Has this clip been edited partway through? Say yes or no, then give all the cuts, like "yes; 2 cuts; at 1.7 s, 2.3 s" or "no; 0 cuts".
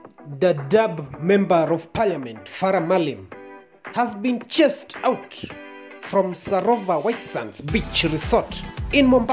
no; 0 cuts